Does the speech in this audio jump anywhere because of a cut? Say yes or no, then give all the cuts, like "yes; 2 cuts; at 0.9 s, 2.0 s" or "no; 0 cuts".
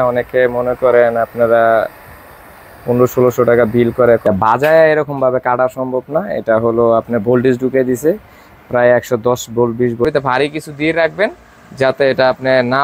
yes; 2 cuts; at 4.2 s, 10.1 s